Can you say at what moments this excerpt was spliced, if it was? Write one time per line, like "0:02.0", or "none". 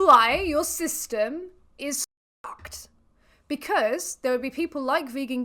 none